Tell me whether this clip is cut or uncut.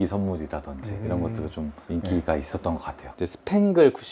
cut